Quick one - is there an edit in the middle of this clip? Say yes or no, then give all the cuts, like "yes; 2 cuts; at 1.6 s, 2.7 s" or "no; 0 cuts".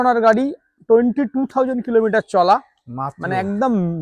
no; 0 cuts